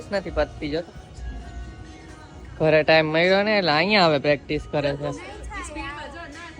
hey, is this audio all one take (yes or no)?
yes